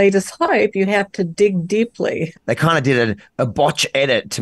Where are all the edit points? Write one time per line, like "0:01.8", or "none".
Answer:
0:02.3